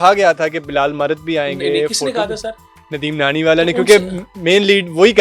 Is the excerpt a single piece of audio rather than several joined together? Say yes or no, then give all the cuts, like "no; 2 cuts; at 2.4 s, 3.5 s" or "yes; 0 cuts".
yes; 0 cuts